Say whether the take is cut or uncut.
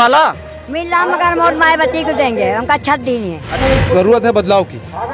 cut